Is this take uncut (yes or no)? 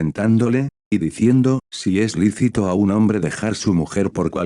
no